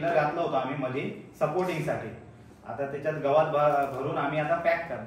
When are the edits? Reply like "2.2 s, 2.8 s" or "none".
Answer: none